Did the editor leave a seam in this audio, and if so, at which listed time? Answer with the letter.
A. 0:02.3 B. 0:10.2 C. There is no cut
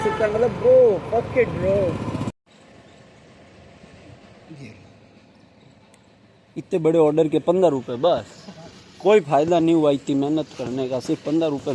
A